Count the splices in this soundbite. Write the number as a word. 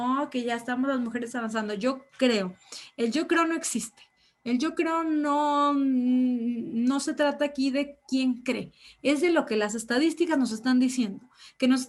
zero